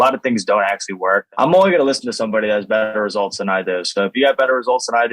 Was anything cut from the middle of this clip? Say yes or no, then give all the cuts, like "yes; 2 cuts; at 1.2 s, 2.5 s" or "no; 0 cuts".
yes; 1 cut; at 1.3 s